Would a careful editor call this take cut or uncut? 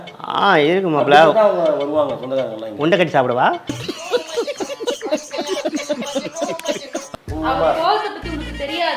cut